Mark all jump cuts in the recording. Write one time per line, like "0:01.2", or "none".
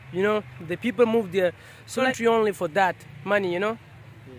0:02.1